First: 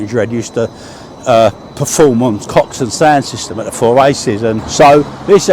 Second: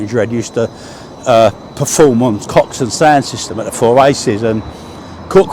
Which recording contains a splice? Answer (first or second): first